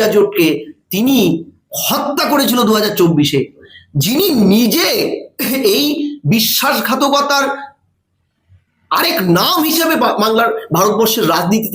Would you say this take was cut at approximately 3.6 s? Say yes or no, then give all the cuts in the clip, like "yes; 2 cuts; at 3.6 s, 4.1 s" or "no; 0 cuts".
yes; 1 cut; at 3.6 s